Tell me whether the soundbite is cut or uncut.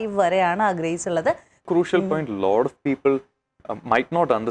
cut